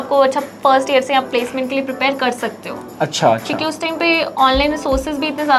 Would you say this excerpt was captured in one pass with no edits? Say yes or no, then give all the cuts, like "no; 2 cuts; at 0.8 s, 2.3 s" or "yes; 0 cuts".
yes; 0 cuts